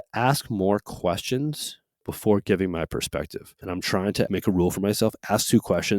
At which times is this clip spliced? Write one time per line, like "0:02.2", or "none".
0:02.0
0:03.9

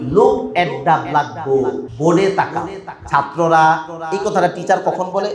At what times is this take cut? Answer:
0:01.9

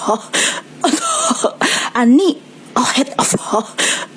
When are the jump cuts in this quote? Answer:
0:01.8

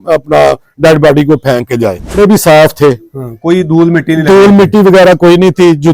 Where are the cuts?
0:02.1

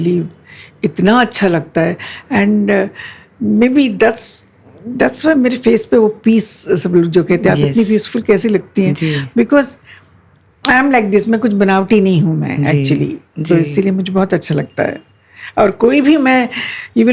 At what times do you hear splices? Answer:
none

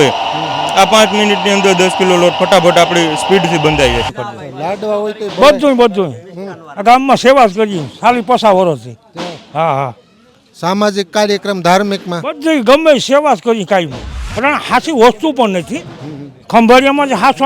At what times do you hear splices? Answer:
0:04.2
0:14.1

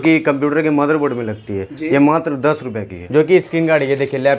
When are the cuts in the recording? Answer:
0:03.0

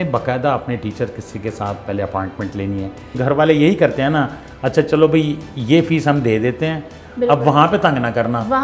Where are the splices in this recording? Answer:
0:03.2

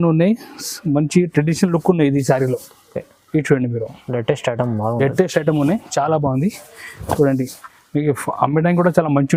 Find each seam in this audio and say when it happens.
none

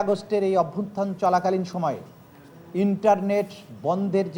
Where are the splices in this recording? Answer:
none

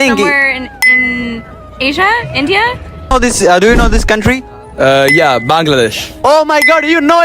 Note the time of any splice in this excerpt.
0:03.1

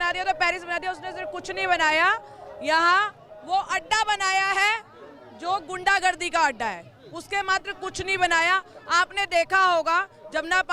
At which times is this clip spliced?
none

